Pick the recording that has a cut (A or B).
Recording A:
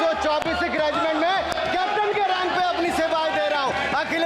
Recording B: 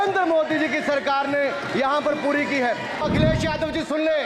B